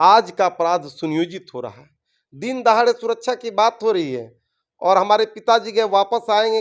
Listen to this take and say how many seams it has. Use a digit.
0